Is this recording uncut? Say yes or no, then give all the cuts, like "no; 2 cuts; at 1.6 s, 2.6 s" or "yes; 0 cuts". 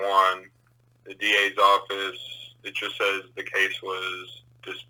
yes; 0 cuts